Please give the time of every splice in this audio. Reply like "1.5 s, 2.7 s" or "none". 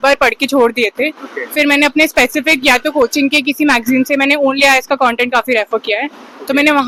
none